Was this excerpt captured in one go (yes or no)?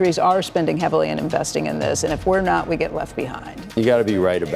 no